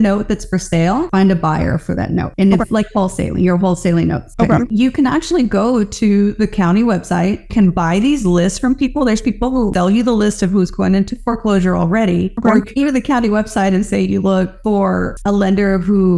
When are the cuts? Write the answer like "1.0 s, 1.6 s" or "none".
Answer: 1.1 s, 4.7 s, 7.5 s, 9.7 s